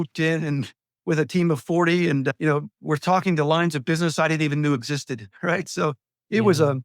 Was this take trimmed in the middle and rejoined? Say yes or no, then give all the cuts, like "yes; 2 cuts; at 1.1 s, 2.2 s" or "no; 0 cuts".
no; 0 cuts